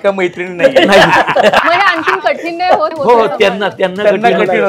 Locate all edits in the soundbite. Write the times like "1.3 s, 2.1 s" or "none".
1.6 s, 2.9 s